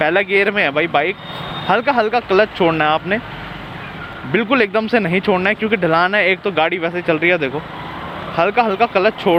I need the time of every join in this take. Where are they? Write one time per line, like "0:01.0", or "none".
none